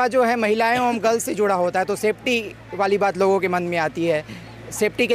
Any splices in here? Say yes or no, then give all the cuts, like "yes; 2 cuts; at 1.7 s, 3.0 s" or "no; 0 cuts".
no; 0 cuts